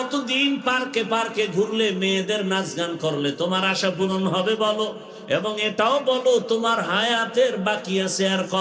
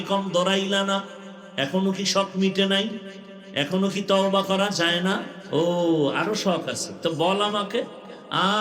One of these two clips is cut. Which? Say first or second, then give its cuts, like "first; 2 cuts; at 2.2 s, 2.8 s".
second; 1 cut; at 5.3 s